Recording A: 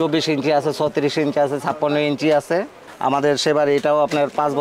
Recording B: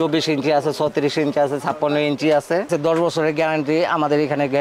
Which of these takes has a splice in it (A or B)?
B